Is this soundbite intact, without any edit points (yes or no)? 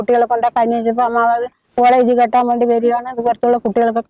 yes